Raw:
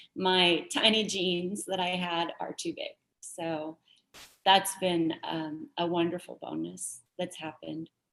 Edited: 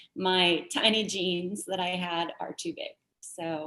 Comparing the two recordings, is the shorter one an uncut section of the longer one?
yes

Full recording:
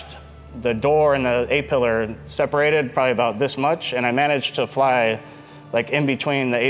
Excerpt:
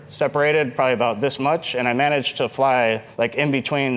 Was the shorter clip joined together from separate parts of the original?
yes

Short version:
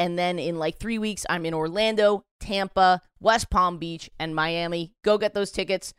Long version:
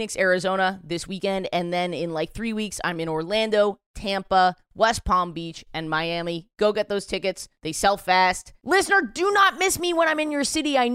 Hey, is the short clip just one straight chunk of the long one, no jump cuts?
yes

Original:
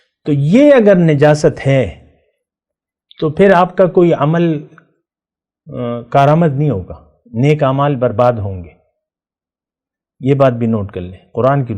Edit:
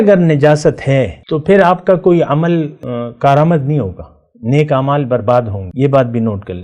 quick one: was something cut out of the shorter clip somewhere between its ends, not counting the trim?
yes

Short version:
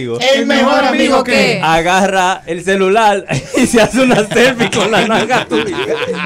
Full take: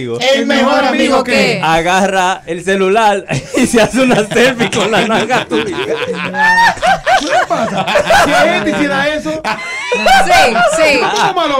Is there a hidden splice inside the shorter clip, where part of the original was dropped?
no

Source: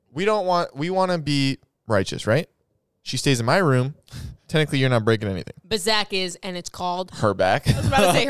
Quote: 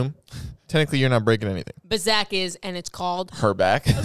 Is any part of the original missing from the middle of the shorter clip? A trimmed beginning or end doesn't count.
no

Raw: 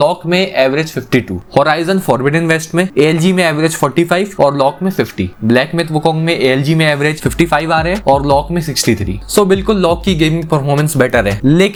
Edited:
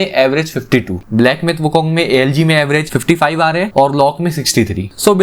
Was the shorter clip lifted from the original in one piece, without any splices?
no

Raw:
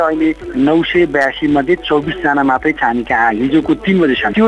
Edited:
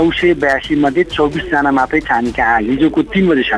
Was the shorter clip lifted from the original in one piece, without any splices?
yes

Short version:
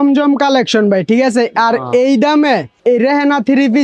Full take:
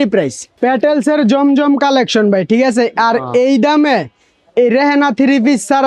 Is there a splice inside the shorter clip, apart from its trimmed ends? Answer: yes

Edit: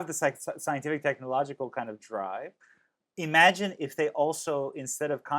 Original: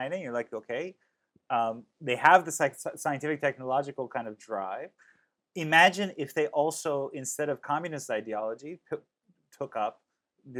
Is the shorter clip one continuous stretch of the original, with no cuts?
yes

